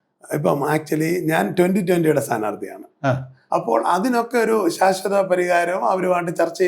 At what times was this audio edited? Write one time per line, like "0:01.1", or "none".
0:03.3